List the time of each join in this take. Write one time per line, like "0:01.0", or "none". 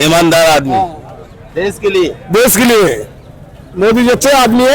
none

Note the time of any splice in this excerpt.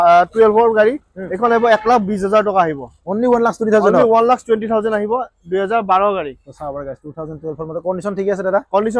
none

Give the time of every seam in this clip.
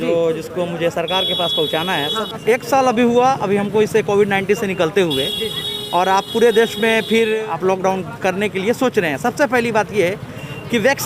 0:02.3
0:07.4

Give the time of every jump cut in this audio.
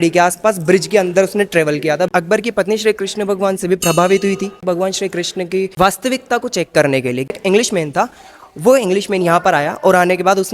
0:02.1
0:04.6
0:05.7
0:07.3

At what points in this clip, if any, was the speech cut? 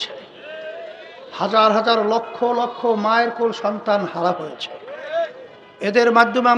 none

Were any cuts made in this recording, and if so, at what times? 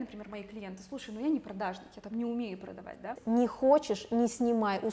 0:03.2

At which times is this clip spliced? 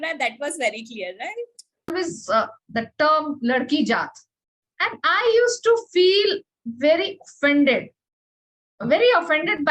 0:01.9

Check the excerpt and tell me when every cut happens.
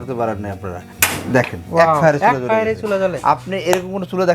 0:00.9

